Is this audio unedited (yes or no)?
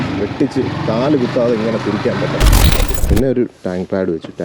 no